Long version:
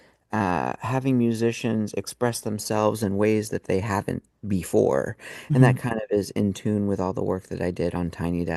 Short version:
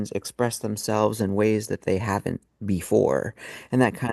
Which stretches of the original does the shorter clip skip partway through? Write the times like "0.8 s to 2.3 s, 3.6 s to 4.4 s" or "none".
none